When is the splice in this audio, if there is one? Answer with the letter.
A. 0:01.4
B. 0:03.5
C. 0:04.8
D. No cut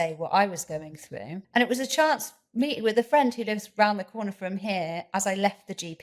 A